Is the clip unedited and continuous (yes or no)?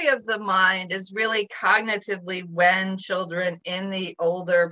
yes